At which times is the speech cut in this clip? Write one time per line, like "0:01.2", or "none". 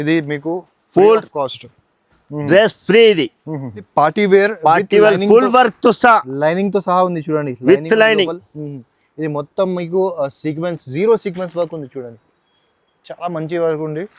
0:03.9